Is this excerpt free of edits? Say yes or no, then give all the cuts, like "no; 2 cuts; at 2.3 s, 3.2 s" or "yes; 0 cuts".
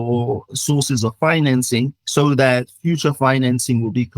no; 1 cut; at 2.0 s